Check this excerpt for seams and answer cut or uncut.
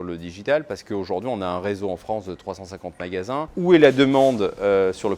cut